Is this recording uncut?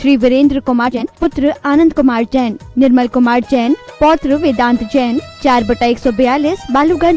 no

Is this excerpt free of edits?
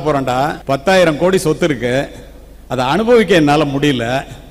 yes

